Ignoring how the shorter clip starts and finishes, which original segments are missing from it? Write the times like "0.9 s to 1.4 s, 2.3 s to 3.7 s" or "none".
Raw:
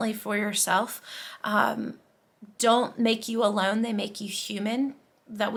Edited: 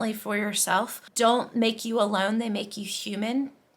1.0 s to 2.4 s